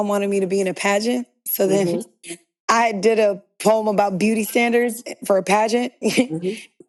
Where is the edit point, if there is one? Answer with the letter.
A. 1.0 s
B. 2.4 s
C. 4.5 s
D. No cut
D